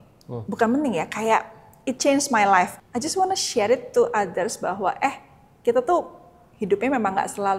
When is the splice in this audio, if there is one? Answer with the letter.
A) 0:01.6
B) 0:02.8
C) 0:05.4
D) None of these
B